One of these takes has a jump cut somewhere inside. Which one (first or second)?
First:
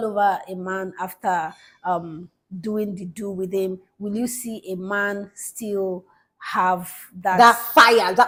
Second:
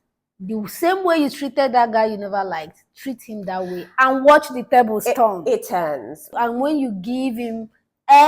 second